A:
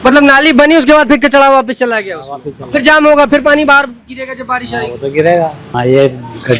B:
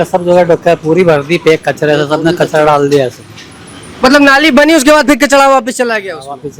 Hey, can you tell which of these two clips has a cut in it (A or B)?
A